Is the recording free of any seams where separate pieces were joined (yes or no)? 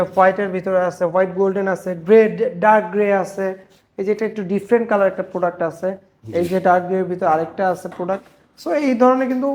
yes